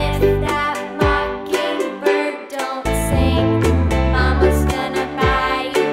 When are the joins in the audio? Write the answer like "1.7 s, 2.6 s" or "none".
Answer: none